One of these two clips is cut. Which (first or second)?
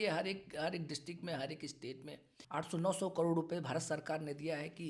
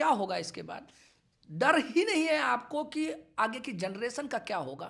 first